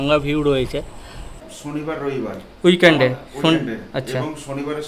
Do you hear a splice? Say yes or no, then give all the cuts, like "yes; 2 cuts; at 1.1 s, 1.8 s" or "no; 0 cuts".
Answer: yes; 1 cut; at 1.3 s